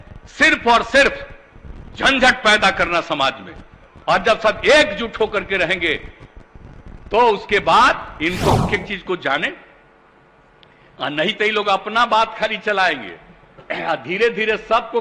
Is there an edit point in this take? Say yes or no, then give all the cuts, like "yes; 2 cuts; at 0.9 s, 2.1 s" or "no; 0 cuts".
yes; 1 cut; at 8.7 s